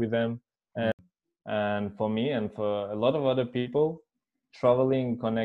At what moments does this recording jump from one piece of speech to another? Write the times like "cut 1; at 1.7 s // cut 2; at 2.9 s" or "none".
cut 1; at 1.0 s